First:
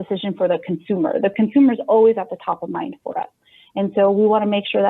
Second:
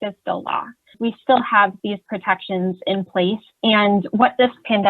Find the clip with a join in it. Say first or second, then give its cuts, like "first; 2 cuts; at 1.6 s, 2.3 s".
second; 1 cut; at 0.9 s